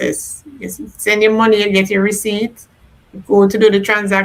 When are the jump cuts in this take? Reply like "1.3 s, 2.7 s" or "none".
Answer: none